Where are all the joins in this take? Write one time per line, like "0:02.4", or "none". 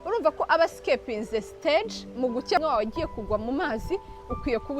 0:02.6